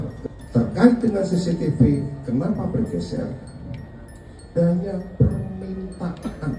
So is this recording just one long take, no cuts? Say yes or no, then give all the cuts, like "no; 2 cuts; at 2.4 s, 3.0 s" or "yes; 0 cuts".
no; 1 cut; at 4.5 s